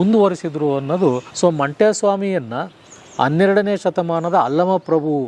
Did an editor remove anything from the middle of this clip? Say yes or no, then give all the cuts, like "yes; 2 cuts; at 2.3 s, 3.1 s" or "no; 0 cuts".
yes; 1 cut; at 1.3 s